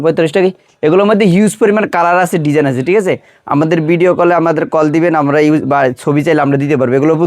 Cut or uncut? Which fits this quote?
uncut